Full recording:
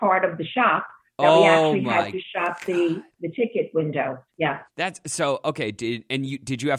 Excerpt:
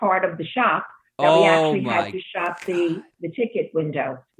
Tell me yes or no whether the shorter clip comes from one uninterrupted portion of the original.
yes